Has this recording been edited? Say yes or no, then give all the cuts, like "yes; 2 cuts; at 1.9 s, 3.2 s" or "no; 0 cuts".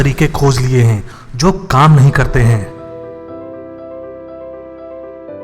no; 0 cuts